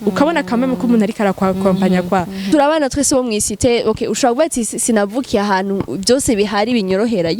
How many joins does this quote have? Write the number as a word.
one